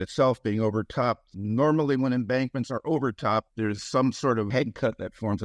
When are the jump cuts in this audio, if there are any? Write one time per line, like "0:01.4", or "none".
0:01.3
0:03.5
0:04.5